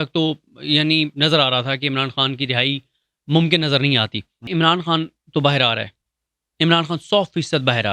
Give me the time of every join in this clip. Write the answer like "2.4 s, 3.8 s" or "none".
4.4 s